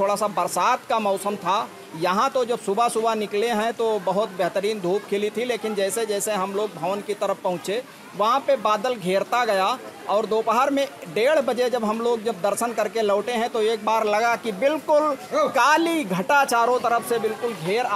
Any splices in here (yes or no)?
no